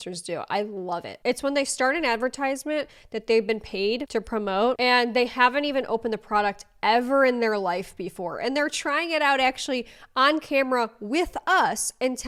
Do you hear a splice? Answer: no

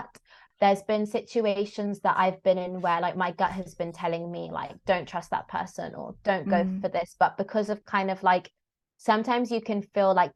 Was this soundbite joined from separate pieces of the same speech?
no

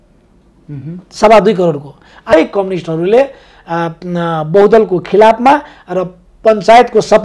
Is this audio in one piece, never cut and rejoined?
no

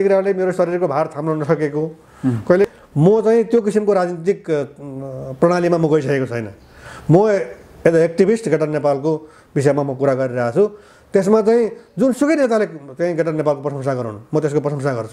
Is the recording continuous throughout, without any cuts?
no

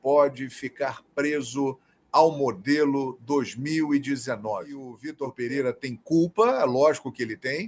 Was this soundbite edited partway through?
yes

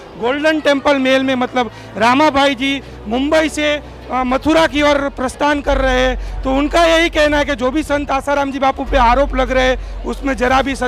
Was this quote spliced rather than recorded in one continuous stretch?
no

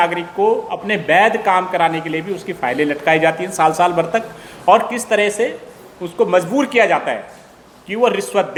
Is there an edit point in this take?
no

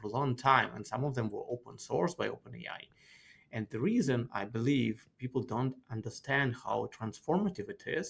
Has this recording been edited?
no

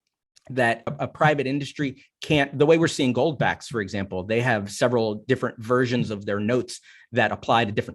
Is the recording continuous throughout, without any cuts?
no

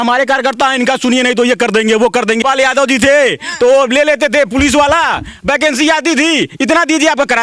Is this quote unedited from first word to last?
no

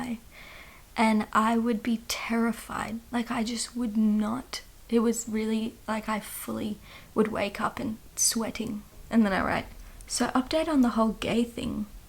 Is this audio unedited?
no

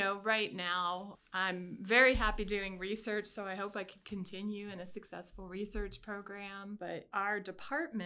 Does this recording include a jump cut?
yes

